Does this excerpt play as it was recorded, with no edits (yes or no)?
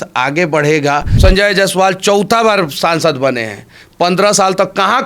no